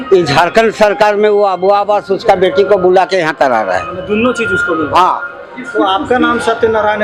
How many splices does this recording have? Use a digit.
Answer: 0